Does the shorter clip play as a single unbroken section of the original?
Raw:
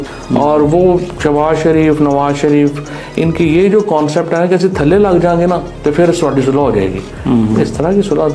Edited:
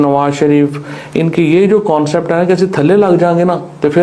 yes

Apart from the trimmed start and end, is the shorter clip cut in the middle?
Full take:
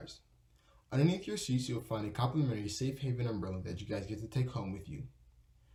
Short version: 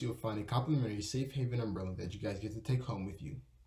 no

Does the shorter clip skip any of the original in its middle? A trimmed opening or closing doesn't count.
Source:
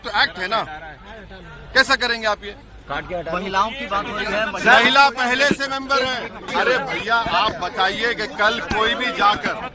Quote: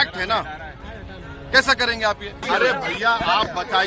yes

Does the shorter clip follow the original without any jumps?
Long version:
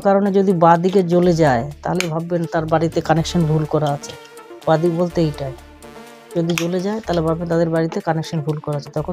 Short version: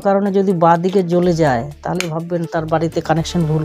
yes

